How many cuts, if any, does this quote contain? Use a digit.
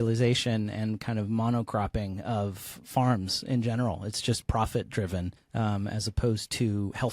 1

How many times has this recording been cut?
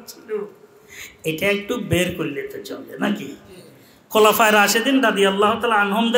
0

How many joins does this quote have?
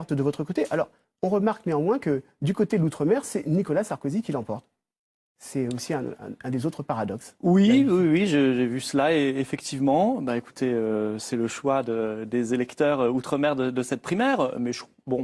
0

